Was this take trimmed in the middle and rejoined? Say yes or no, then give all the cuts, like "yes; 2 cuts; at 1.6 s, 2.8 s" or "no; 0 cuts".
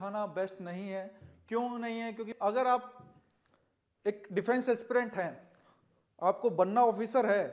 yes; 1 cut; at 2.3 s